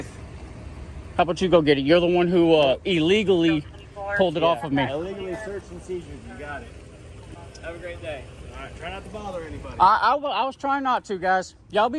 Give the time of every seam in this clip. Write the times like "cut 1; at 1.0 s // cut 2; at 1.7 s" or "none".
none